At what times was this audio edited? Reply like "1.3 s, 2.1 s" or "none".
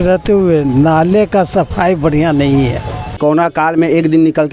3.2 s